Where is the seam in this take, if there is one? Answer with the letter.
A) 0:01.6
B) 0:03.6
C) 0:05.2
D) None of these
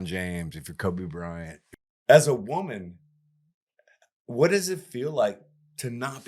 A